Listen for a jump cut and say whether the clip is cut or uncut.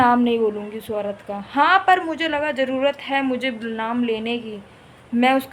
uncut